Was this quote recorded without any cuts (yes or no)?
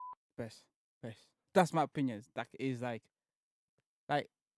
no